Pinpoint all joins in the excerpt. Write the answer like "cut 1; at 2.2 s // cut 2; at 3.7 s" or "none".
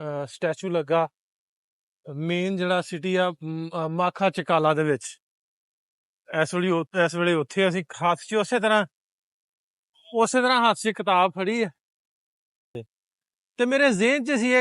cut 1; at 12.8 s